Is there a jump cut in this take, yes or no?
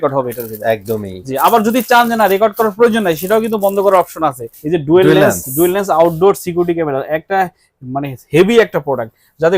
yes